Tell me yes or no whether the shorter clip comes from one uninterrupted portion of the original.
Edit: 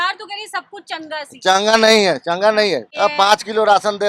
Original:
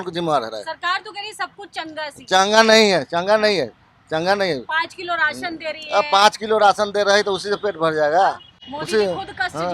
no